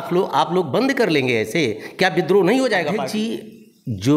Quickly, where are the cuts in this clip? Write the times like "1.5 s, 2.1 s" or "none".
3.0 s